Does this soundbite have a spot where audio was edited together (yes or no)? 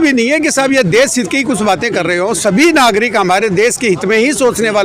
no